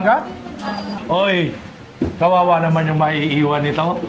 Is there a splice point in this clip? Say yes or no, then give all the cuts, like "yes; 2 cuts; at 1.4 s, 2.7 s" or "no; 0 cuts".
yes; 1 cut; at 0.9 s